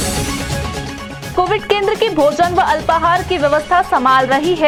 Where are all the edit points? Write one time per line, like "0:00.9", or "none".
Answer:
none